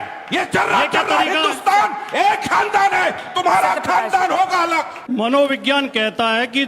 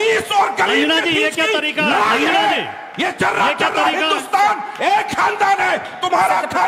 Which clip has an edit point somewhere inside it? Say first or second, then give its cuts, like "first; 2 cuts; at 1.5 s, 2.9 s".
first; 1 cut; at 4.9 s